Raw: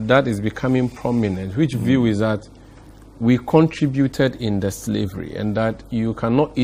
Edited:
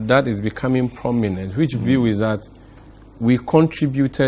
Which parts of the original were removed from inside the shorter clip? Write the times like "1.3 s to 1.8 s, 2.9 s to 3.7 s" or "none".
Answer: none